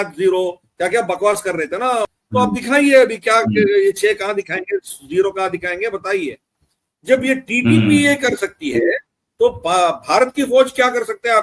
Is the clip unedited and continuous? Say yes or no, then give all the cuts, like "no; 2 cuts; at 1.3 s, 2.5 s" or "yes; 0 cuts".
no; 1 cut; at 2.1 s